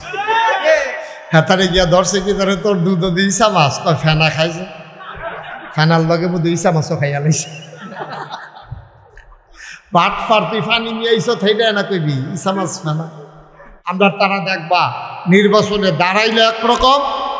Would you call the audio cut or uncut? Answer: cut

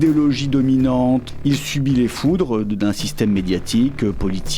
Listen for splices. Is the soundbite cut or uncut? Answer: cut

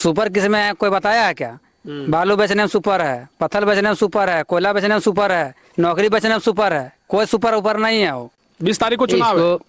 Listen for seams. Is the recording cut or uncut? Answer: cut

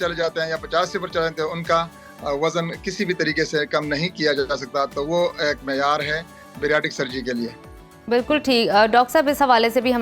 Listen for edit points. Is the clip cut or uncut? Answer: uncut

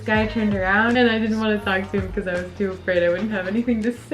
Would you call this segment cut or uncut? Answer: cut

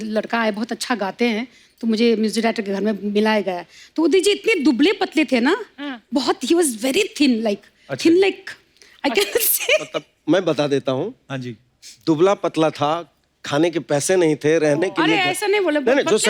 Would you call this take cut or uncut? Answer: uncut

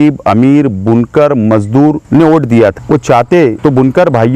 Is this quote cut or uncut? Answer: cut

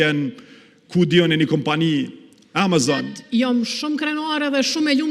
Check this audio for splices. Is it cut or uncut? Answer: cut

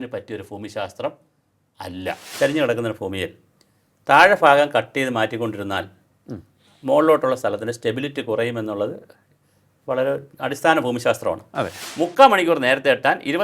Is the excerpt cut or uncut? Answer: cut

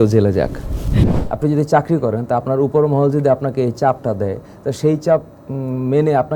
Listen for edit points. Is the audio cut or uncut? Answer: cut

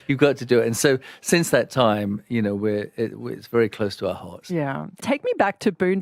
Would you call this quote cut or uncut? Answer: cut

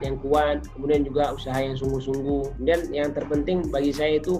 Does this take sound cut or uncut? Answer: cut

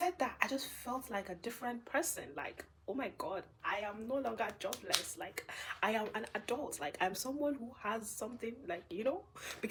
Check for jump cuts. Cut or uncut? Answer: uncut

